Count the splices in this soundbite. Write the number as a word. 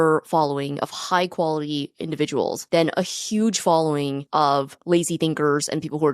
two